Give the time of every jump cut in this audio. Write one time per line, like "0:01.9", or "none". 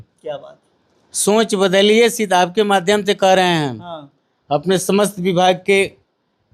none